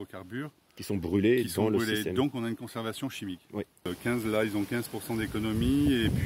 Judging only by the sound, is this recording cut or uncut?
cut